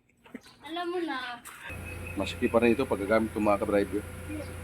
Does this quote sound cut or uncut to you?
cut